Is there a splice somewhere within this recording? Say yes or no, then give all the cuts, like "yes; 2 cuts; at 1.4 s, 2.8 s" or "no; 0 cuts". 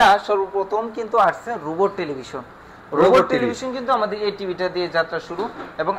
no; 0 cuts